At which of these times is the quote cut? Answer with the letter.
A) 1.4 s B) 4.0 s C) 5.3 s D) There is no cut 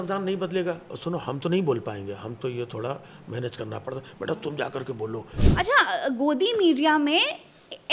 C